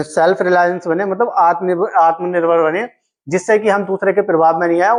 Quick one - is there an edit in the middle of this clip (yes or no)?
no